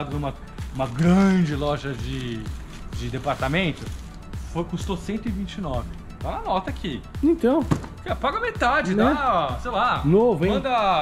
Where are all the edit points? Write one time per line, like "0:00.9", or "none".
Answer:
none